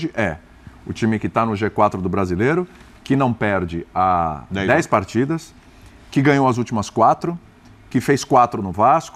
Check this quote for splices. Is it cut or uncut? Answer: uncut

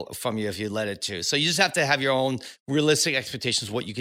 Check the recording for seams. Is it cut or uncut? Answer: cut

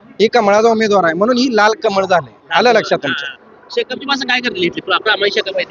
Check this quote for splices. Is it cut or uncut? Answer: uncut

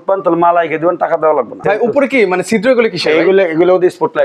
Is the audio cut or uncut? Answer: cut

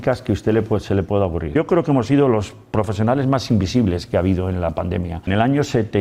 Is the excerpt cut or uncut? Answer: cut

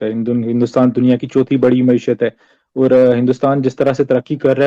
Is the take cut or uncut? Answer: uncut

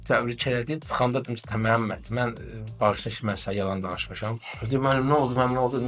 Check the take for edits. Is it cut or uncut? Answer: uncut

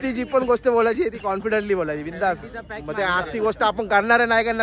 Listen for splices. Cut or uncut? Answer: uncut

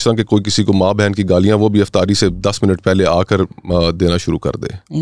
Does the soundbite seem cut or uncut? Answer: uncut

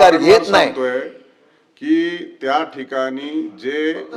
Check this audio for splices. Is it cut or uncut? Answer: uncut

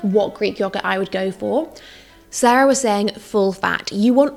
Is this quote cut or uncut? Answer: uncut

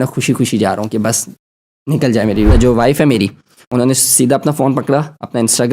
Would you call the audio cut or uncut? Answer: cut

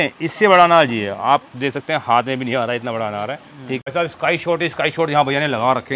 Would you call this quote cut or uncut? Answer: cut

